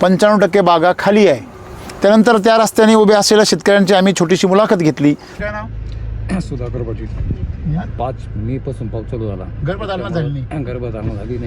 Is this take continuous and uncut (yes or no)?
no